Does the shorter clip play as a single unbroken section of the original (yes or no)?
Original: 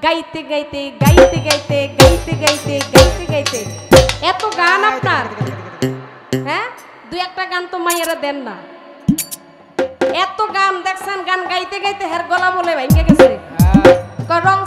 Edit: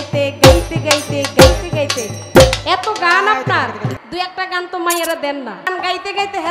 no